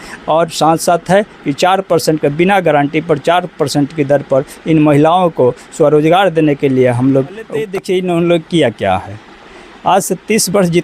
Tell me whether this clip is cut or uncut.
cut